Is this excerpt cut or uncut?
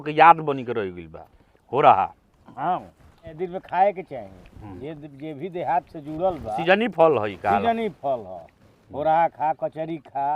cut